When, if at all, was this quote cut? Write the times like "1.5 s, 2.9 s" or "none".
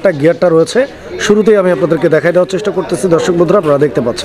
none